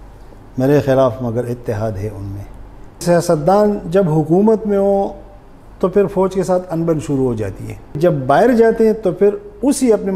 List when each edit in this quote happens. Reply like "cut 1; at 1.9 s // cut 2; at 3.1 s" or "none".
cut 1; at 3.0 s // cut 2; at 8.0 s